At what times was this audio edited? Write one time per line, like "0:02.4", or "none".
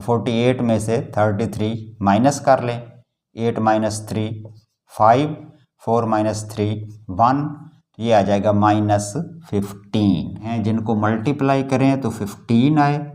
0:10.5